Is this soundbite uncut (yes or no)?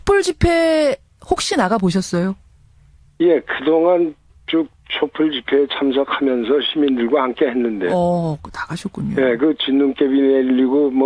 no